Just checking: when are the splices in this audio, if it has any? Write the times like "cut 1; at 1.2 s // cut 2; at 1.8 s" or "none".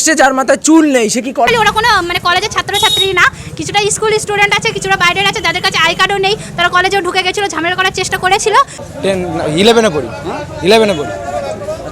cut 1; at 1.5 s // cut 2; at 8.9 s